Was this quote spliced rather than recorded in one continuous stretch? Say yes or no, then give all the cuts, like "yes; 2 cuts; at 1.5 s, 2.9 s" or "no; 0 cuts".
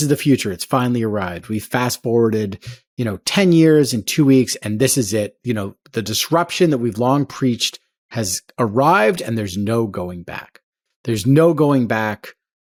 no; 0 cuts